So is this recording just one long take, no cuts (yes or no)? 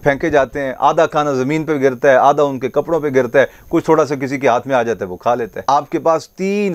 no